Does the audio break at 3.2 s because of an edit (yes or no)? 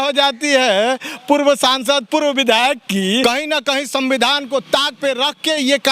yes